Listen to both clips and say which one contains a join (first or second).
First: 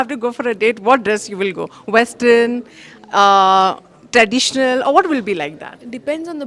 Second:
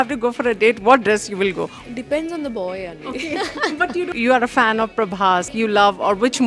second